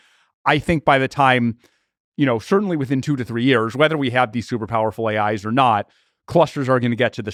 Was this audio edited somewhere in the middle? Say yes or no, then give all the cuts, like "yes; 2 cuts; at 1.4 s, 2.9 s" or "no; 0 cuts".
no; 0 cuts